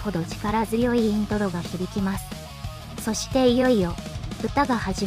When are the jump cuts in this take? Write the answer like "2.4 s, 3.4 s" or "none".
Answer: 2.8 s